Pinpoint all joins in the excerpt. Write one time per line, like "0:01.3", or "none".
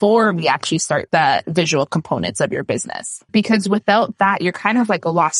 0:01.0